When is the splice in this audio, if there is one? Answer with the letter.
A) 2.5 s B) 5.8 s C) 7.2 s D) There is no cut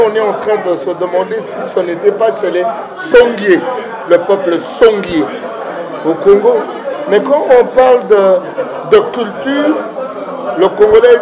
D